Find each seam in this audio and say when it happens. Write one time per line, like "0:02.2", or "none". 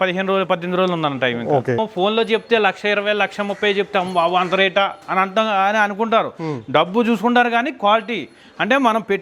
0:01.8